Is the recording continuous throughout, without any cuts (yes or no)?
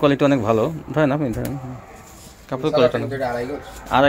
yes